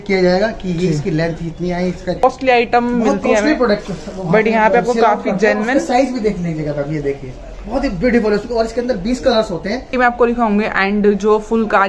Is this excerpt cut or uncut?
cut